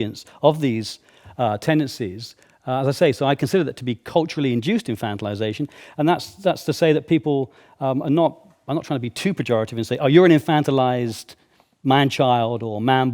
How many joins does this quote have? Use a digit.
0